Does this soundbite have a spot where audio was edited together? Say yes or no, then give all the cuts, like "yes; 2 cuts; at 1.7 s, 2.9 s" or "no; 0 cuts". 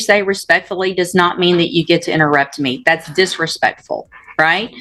no; 0 cuts